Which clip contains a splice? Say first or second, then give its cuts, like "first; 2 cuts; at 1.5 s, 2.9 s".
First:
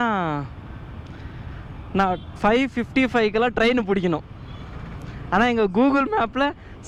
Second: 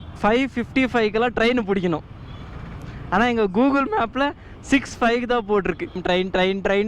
second; 1 cut; at 6.0 s